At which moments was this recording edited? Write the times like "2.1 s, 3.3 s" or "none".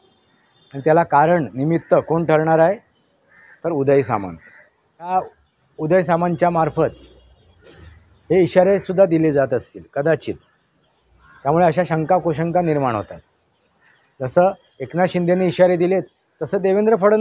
5.1 s